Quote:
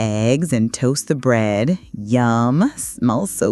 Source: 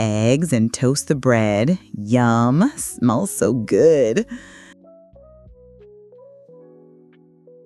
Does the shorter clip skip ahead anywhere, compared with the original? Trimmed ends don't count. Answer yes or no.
no